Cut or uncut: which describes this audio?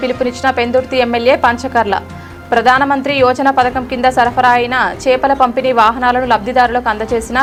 uncut